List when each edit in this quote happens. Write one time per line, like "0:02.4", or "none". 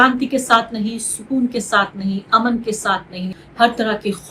0:03.4